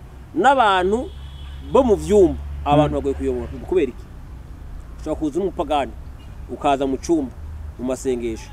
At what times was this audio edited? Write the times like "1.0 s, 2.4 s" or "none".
3.6 s